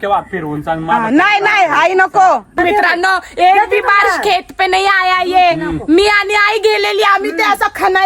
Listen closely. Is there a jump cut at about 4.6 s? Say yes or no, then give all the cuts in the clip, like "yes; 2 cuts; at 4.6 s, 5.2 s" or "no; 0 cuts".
no; 1 cut; at 2.5 s